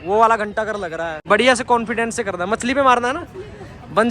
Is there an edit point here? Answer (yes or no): yes